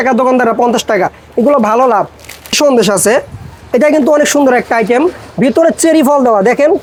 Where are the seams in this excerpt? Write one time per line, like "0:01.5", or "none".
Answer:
none